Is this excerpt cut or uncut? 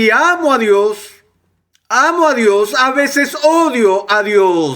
uncut